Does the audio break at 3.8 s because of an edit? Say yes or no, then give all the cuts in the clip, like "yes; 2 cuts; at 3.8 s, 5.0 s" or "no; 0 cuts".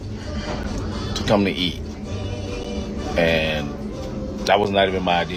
no; 0 cuts